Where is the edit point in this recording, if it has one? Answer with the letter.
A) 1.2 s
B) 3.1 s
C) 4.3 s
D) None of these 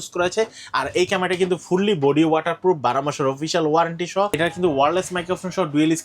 C